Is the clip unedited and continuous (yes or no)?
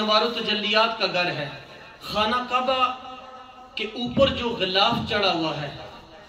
yes